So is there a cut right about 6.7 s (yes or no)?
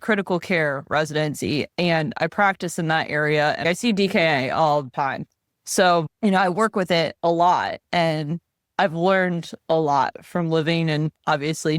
no